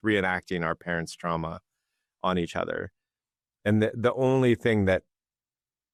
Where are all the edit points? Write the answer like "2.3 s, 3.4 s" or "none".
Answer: none